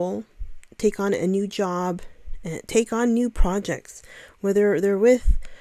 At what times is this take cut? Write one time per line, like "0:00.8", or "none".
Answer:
none